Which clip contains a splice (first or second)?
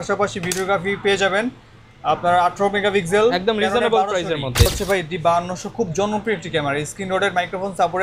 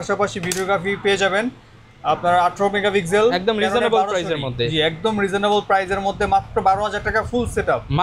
first